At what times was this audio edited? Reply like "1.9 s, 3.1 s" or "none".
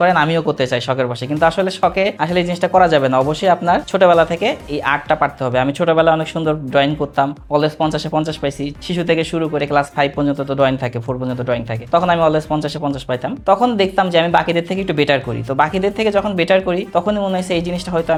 none